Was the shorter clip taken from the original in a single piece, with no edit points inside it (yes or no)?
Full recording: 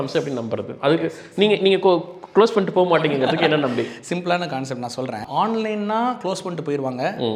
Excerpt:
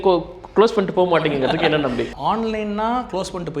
no